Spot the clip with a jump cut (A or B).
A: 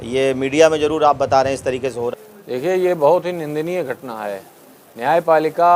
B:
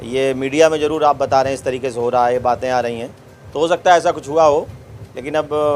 A